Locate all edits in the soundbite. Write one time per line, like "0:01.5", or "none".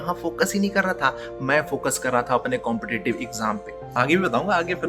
0:03.7